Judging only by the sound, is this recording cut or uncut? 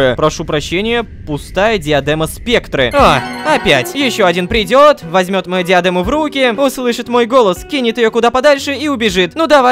uncut